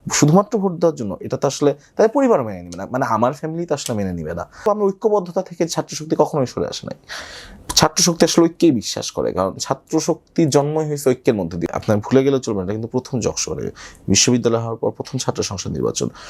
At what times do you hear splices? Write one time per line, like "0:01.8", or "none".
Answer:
0:04.6
0:11.6